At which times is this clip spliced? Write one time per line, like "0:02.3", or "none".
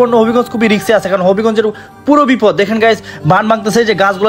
none